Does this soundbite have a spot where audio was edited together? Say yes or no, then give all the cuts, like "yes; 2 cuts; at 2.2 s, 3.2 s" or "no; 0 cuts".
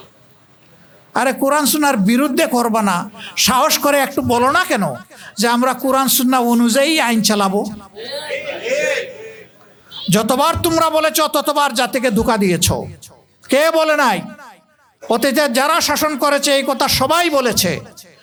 no; 0 cuts